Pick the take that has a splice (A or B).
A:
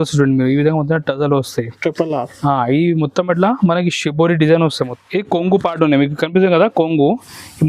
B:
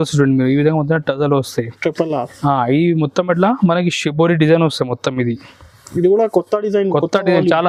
A